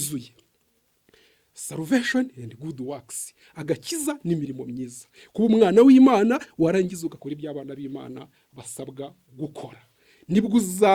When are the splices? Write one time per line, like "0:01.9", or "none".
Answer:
none